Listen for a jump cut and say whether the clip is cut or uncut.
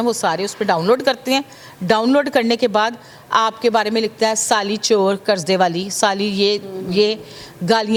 uncut